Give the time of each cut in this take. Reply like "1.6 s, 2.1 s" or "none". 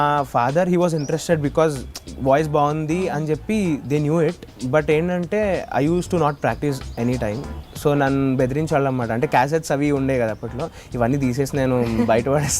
4.5 s